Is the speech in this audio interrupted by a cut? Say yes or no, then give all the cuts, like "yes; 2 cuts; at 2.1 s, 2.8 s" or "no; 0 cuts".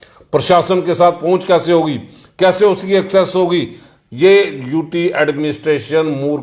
no; 0 cuts